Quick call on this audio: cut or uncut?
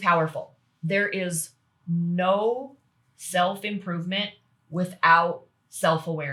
uncut